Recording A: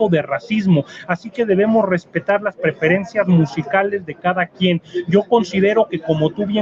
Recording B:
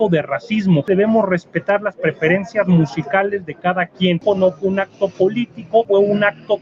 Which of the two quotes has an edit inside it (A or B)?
B